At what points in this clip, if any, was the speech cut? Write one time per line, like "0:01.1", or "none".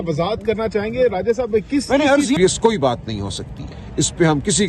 0:02.4